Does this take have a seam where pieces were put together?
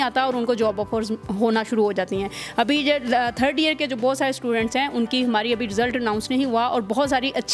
no; 0 cuts

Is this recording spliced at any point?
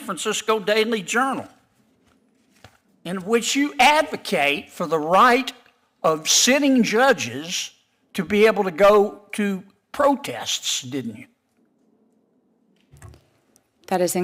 no; 0 cuts

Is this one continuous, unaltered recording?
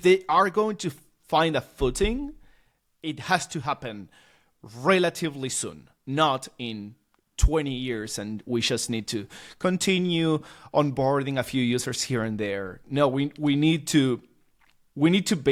yes; 0 cuts

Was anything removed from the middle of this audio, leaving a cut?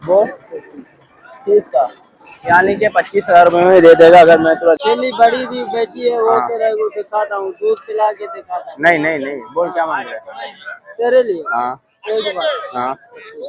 yes; 1 cut; at 4.8 s

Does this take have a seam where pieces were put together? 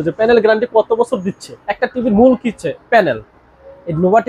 yes; 1 cut; at 1.6 s

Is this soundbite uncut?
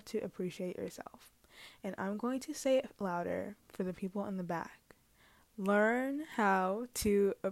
yes; 0 cuts

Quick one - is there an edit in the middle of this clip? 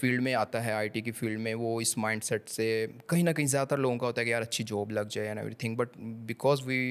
no; 0 cuts

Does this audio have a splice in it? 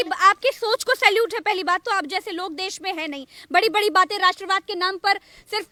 no; 0 cuts

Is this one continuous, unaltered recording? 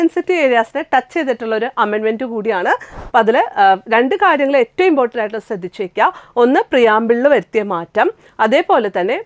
no; 1 cut; at 2.9 s

